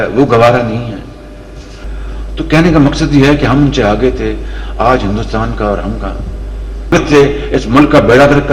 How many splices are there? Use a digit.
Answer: 2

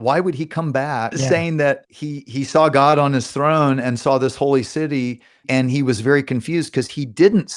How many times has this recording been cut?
3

